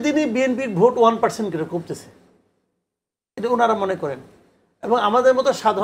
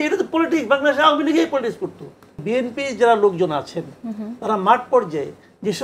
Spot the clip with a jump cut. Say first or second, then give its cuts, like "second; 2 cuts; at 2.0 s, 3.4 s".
second; 1 cut; at 2.4 s